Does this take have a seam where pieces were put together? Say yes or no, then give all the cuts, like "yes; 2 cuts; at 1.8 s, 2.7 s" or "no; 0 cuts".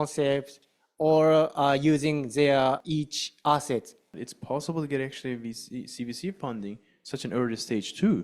yes; 2 cuts; at 2.8 s, 4.1 s